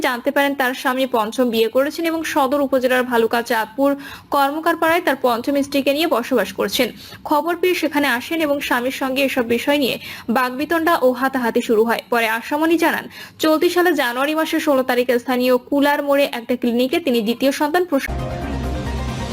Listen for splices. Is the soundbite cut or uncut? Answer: cut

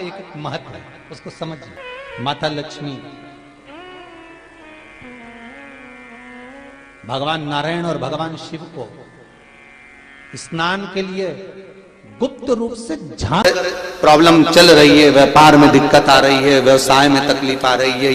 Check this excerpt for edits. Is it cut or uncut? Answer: cut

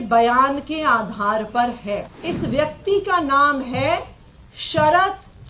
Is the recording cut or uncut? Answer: cut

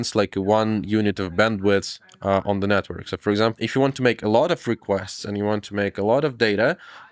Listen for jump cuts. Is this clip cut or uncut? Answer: uncut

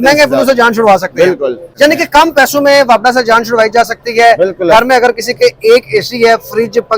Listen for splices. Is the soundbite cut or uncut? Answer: cut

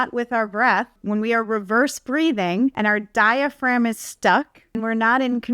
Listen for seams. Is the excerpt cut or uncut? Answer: cut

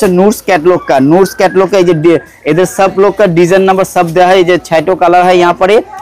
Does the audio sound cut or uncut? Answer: uncut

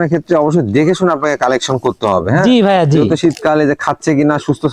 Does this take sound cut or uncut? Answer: uncut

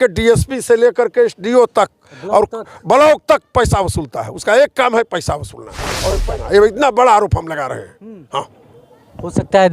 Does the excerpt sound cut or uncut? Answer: cut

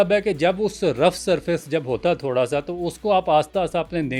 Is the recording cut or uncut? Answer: uncut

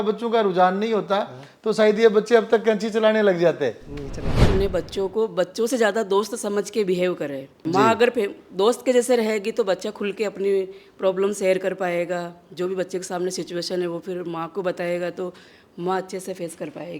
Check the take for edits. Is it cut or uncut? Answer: cut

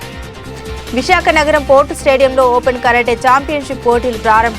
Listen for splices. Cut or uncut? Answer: cut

